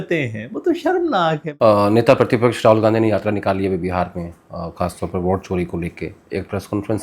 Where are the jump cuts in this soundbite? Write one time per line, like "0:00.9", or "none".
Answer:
0:01.4

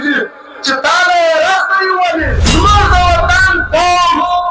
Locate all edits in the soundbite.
0:02.4

